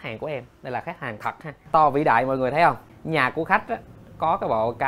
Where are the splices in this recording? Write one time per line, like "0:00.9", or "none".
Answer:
0:01.6
0:02.9